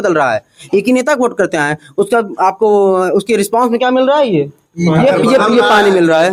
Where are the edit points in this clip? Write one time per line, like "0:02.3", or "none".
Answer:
none